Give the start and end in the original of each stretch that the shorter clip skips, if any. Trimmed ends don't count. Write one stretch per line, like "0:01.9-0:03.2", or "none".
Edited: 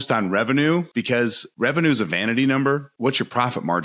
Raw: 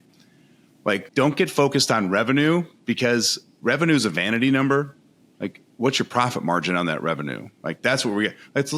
0:02.9-0:03.2
0:04.9-0:05.7